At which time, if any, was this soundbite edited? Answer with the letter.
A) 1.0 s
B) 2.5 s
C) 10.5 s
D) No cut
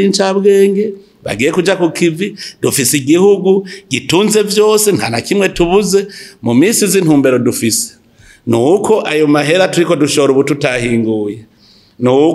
D